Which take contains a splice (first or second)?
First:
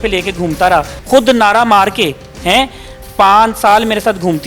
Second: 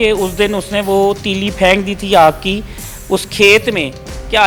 first